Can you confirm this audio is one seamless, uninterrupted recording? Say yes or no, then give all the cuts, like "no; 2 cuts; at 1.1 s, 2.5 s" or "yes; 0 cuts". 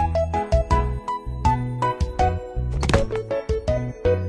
yes; 0 cuts